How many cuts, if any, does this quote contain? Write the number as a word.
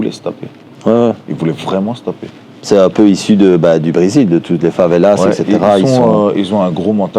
zero